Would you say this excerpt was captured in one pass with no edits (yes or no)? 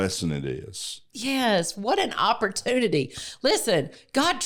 yes